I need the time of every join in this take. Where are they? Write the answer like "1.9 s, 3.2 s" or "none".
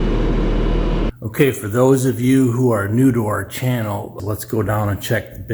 1.1 s, 4.1 s